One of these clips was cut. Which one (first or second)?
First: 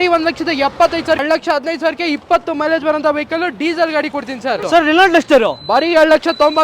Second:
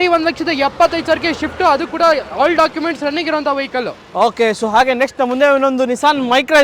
first